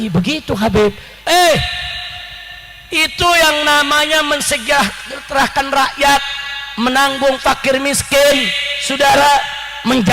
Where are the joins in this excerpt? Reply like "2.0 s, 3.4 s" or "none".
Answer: 1.2 s